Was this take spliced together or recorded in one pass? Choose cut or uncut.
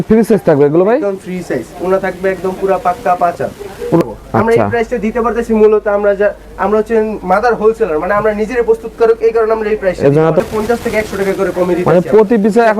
cut